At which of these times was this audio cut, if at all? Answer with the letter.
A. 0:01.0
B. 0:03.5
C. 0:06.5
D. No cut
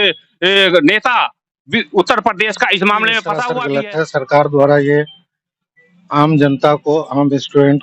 B